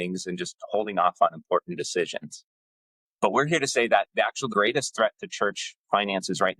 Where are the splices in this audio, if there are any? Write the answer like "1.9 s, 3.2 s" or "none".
4.5 s